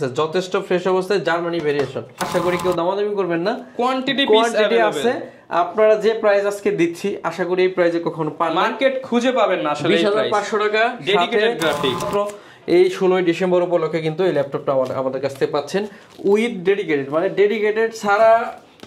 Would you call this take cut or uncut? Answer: cut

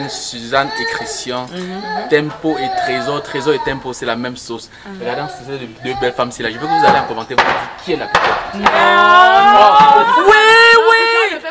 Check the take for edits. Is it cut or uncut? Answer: uncut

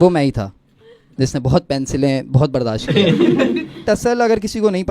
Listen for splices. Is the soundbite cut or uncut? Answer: cut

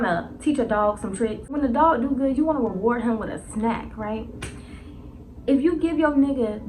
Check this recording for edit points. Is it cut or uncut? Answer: cut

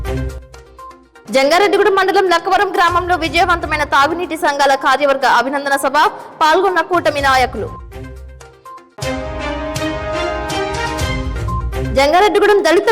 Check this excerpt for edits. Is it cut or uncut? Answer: uncut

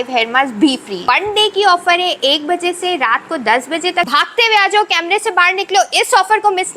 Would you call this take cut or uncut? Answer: cut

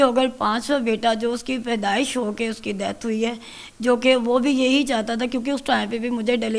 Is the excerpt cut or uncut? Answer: uncut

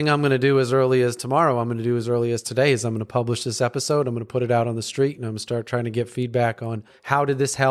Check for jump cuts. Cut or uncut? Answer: uncut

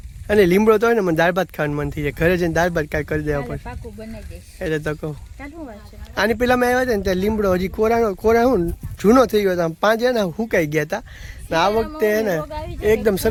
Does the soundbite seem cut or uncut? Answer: uncut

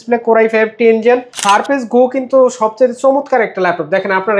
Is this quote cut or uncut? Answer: cut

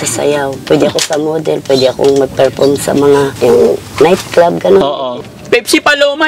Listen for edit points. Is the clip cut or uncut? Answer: cut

